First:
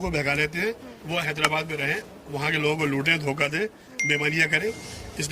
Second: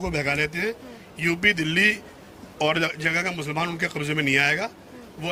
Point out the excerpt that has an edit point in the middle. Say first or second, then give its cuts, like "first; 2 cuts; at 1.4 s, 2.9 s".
first; 1 cut; at 0.9 s